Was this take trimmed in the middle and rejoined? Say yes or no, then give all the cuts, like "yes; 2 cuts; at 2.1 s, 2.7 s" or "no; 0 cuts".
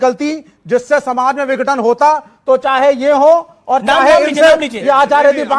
no; 0 cuts